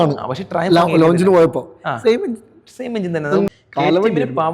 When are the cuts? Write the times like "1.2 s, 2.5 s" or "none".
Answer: 3.5 s